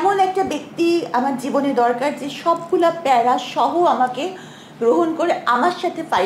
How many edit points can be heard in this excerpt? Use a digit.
0